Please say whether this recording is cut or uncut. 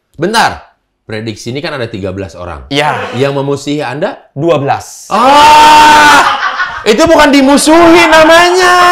uncut